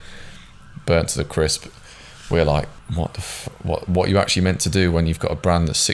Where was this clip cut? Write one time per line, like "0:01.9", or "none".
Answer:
0:02.8

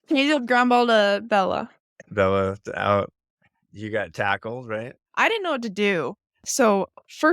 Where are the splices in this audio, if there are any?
0:05.0

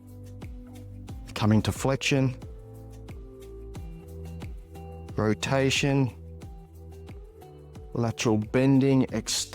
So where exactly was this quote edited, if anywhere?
0:01.3
0:03.0
0:05.1
0:06.1
0:07.9

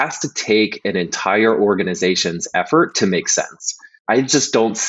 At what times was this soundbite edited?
0:03.9

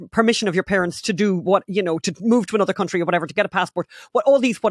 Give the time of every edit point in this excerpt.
none

